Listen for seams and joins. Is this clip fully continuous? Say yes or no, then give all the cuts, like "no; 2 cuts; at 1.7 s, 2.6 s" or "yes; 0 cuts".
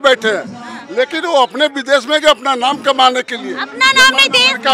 yes; 0 cuts